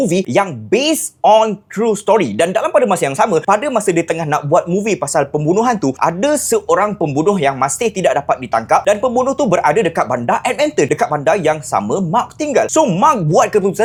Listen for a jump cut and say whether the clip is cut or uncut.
uncut